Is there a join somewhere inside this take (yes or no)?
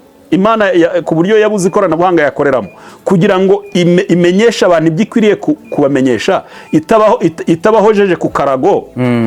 no